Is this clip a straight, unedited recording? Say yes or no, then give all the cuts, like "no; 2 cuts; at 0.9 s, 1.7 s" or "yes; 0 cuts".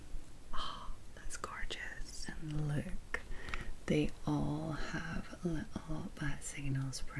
no; 1 cut; at 2.2 s